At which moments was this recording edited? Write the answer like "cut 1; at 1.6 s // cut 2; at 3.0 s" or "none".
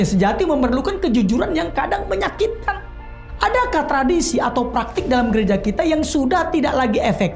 cut 1; at 3.3 s